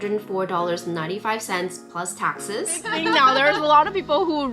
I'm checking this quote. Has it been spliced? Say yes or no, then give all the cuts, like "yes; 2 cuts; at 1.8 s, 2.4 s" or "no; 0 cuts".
yes; 1 cut; at 2.9 s